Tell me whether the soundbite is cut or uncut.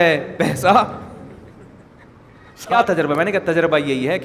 cut